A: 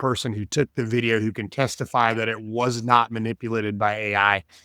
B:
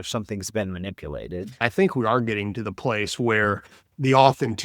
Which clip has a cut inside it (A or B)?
B